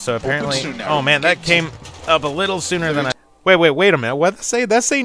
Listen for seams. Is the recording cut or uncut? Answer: cut